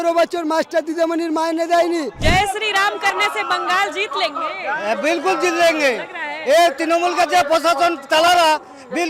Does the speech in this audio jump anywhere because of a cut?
yes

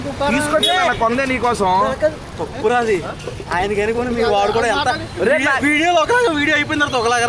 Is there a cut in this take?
no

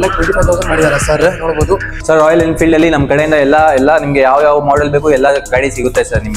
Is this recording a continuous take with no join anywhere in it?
no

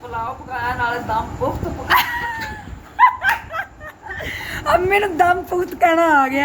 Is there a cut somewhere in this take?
no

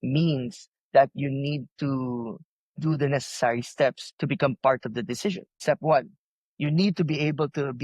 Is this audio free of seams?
no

